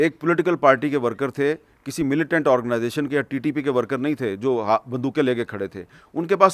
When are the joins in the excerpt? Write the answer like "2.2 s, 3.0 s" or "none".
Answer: none